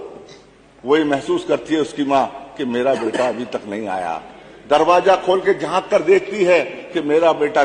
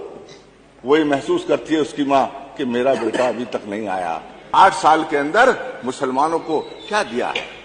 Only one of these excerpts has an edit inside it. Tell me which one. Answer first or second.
second